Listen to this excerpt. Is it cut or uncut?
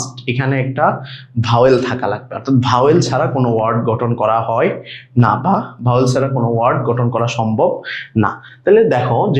uncut